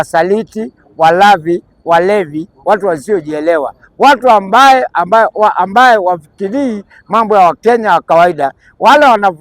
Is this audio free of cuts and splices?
yes; 0 cuts

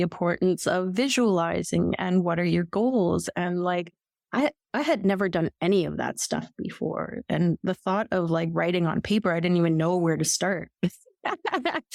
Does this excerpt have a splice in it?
no; 0 cuts

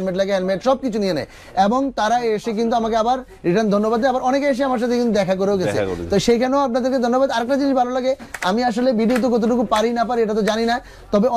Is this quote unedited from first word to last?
yes; 0 cuts

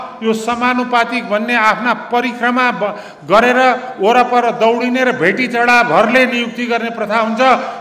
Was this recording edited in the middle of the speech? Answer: no; 0 cuts

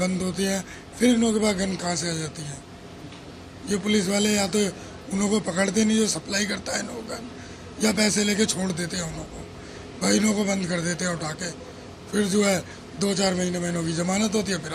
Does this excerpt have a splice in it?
no; 0 cuts

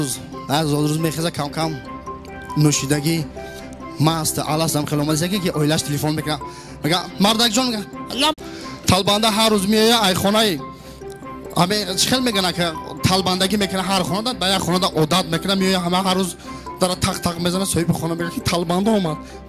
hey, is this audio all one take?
yes; 0 cuts

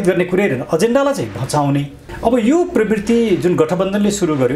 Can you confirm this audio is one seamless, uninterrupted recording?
no; 1 cut; at 2.0 s

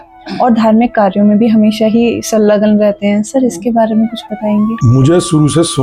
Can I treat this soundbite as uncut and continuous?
yes; 0 cuts

